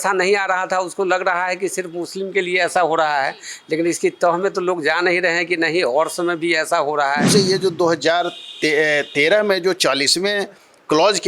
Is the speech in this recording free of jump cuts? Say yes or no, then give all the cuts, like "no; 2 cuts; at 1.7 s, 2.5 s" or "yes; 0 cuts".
no; 1 cut; at 7.3 s